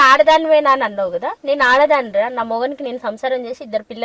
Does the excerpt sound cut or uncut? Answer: uncut